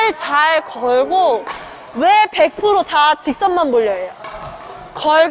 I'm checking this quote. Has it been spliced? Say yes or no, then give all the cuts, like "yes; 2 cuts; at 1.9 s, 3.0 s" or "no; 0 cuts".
no; 0 cuts